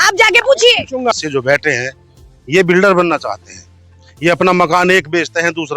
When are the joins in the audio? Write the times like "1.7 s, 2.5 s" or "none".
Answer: 1.1 s

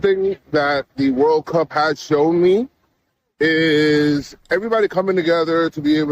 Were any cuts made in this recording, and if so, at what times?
none

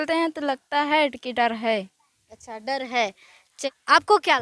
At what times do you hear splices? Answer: none

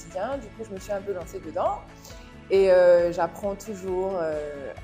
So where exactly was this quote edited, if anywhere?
none

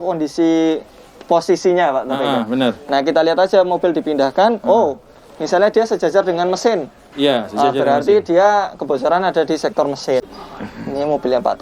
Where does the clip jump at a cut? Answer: 10.3 s

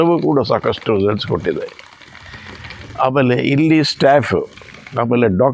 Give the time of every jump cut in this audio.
none

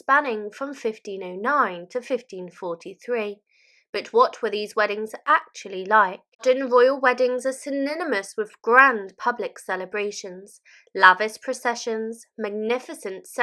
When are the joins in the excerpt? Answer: 6.4 s

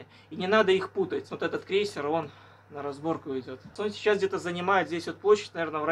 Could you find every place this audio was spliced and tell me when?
1.3 s, 3.8 s

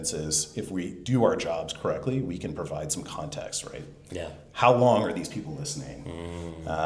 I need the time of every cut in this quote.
none

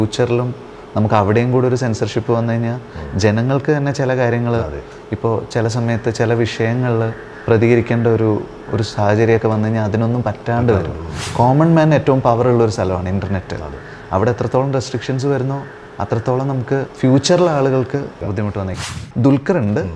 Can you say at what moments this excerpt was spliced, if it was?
7.3 s, 11.2 s, 16.9 s, 18.5 s

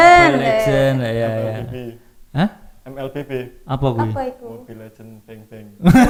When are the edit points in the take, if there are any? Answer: none

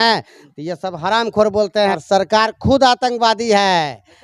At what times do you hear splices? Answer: 1.9 s

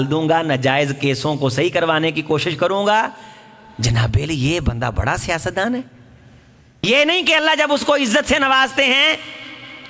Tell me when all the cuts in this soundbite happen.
6.8 s

